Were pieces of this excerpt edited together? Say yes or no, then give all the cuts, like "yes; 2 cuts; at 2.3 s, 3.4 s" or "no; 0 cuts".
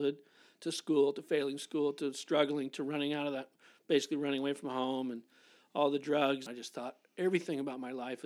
yes; 1 cut; at 6.5 s